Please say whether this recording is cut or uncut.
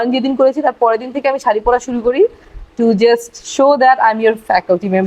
uncut